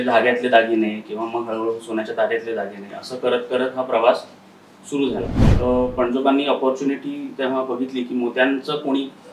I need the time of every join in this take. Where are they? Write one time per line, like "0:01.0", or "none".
0:05.4